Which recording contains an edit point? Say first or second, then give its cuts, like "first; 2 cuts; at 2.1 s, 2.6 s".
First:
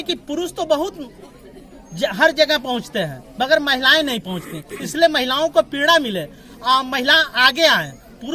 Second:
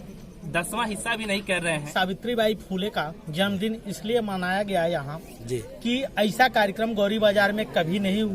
second; 1 cut; at 1.9 s